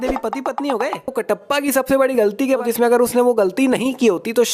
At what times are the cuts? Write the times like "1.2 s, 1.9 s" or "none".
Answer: 1.2 s, 2.6 s

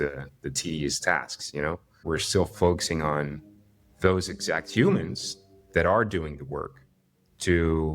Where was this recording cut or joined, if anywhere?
1.9 s

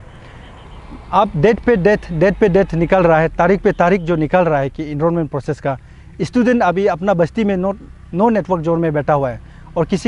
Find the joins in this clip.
none

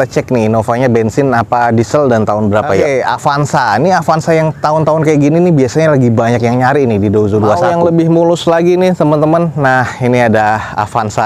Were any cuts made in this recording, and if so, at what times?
2.8 s, 7.6 s

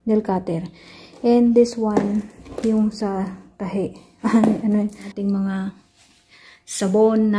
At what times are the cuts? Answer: 5.1 s

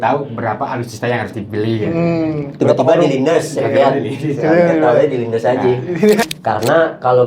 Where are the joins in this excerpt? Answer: 6.2 s

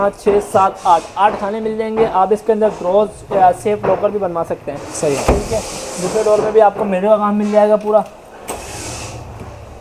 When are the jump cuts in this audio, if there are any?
none

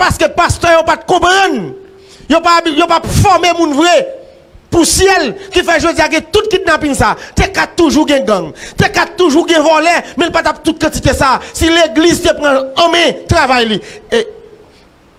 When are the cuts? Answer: none

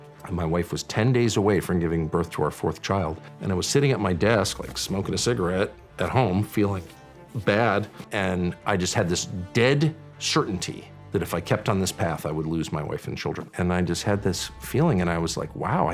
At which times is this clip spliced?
13.5 s

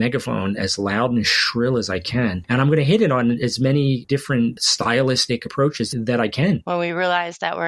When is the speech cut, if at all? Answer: 2.4 s, 6.6 s

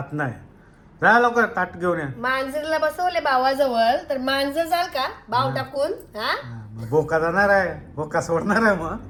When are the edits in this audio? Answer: none

